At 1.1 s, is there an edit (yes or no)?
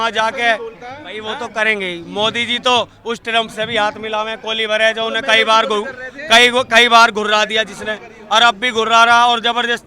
yes